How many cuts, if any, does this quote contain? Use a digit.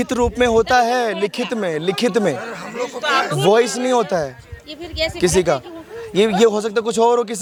0